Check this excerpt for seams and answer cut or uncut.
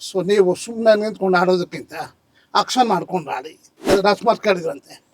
cut